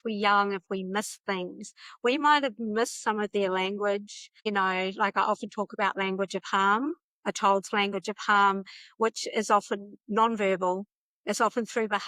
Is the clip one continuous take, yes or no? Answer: yes